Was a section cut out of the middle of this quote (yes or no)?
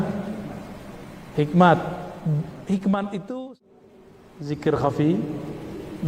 yes